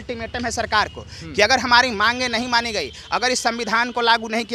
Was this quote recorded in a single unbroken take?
yes; 0 cuts

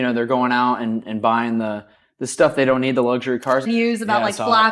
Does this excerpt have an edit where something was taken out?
yes; 1 cut; at 3.6 s

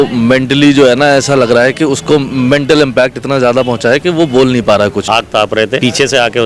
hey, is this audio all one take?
no; 1 cut; at 5.4 s

